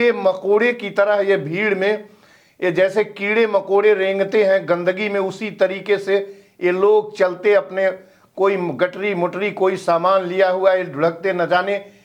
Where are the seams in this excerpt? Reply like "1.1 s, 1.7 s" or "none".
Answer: none